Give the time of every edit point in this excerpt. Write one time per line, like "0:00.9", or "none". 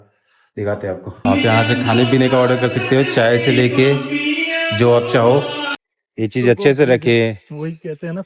0:01.2
0:05.6